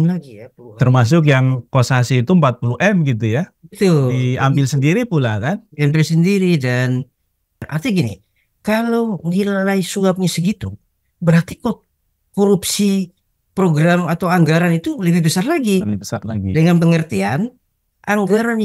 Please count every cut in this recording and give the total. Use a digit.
1